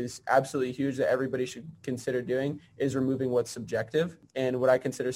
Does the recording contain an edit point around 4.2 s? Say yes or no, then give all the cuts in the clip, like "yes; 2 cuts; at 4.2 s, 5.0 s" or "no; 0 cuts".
yes; 1 cut; at 4.2 s